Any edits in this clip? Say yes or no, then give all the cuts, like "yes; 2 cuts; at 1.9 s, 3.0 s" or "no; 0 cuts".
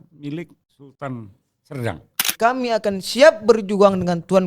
yes; 1 cut; at 2.3 s